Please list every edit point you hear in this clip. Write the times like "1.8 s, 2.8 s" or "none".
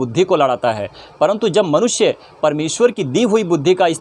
none